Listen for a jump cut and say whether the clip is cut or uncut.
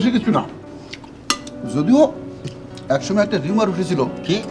uncut